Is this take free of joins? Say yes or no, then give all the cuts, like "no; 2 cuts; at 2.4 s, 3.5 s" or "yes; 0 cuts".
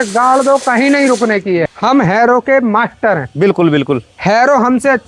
no; 1 cut; at 1.6 s